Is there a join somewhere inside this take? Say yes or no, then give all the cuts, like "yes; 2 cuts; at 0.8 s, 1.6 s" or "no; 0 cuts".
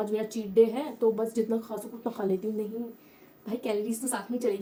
no; 0 cuts